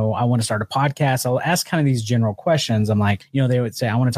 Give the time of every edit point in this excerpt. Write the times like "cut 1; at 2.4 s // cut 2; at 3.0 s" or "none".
cut 1; at 3.2 s